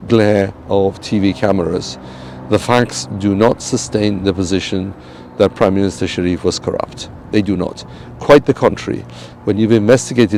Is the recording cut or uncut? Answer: uncut